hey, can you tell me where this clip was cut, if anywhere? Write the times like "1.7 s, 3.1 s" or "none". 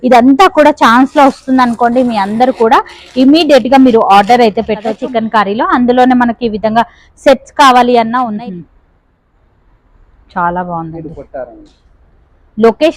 4.9 s, 8.3 s